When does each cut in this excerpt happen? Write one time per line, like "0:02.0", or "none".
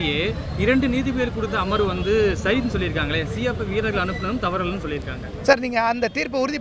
none